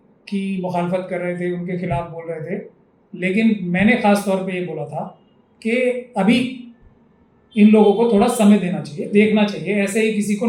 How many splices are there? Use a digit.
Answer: 0